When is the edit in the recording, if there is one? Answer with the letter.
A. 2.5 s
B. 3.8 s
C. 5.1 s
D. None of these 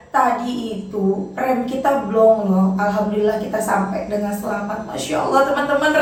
D